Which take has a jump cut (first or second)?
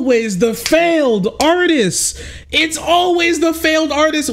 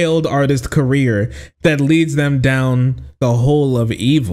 second